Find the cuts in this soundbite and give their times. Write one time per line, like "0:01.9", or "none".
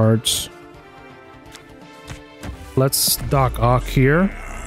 none